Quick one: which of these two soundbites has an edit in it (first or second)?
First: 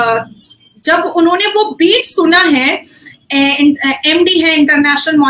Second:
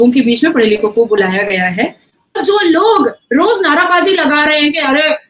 second